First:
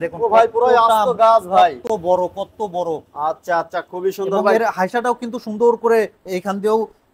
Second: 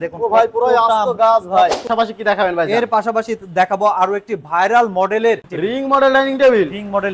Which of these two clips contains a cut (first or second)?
second